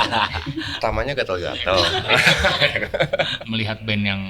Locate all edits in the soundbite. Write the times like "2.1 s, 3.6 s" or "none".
3.3 s